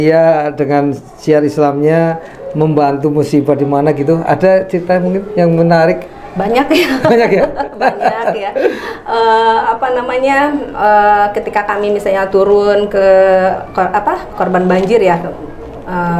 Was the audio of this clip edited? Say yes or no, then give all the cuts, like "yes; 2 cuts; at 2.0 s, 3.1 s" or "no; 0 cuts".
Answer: no; 0 cuts